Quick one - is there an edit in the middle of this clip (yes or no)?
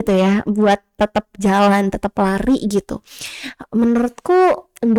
no